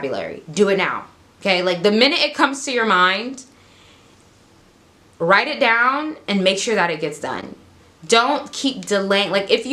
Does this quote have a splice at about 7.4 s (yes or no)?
no